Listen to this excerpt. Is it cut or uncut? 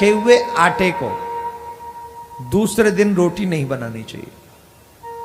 uncut